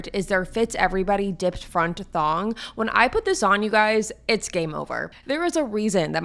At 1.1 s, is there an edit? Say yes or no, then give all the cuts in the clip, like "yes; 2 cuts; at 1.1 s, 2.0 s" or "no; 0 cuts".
no; 1 cut; at 5.1 s